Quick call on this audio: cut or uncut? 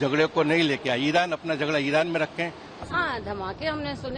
cut